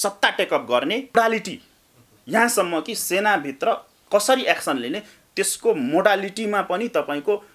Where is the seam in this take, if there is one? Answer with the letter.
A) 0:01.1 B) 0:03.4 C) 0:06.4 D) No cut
A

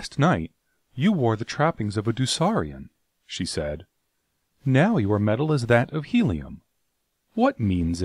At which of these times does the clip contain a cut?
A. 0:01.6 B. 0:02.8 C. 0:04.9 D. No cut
A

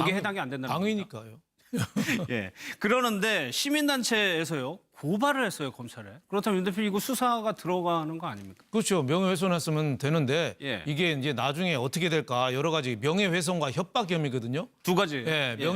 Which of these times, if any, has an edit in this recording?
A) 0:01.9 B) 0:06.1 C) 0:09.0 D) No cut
C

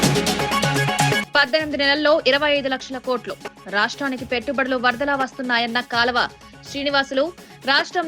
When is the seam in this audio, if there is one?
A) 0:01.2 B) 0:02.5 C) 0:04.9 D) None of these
A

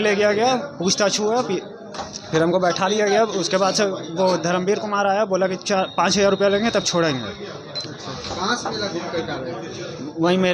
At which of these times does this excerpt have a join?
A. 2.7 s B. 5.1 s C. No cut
C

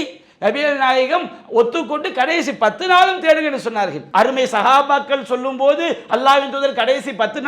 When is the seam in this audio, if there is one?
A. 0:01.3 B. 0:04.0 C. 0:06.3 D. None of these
B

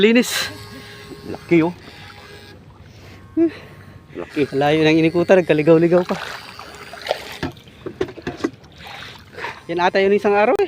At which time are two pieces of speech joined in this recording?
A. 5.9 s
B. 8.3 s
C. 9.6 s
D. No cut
C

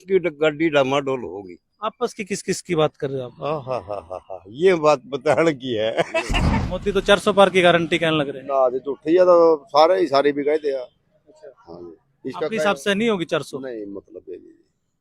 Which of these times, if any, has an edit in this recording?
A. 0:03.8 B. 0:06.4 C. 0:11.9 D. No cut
B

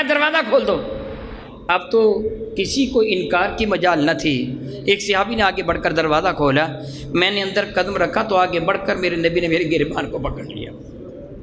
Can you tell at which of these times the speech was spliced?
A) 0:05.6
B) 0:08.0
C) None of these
C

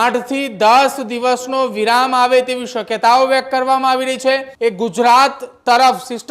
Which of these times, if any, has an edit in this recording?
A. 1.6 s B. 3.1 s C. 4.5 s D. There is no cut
C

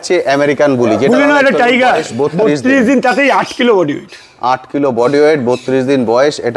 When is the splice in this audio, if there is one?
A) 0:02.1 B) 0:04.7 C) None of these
A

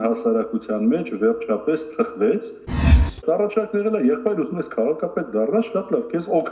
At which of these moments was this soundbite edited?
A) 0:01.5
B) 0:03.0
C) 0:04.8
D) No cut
B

